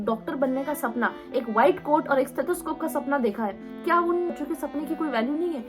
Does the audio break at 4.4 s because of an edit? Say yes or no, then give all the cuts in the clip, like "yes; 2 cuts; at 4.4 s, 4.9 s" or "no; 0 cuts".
yes; 1 cut; at 4.4 s